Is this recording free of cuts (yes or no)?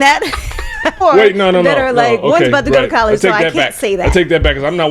no